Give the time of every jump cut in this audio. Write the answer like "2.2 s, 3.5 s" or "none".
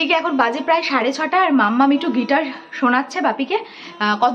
none